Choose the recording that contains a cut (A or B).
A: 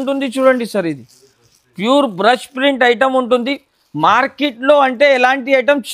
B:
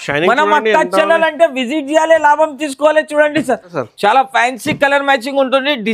B